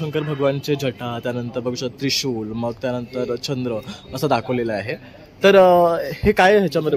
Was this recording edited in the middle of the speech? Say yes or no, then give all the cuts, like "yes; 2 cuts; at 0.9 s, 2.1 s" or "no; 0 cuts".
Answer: no; 0 cuts